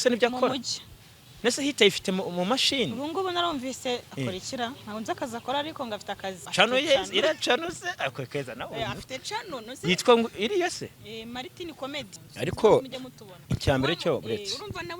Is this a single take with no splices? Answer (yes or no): no